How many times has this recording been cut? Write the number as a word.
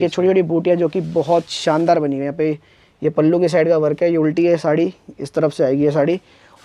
zero